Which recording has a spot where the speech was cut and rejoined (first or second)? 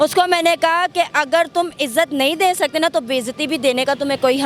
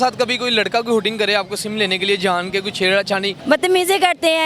second